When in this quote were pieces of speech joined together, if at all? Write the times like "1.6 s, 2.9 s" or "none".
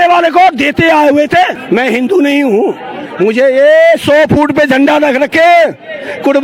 1.6 s